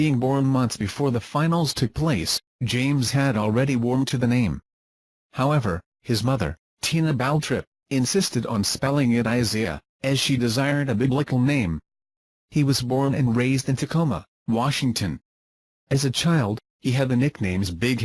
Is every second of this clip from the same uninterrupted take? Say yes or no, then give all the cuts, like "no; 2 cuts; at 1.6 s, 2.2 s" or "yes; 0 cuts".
yes; 0 cuts